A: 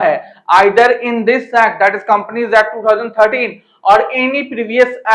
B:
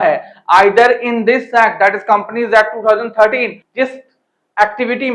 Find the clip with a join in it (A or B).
B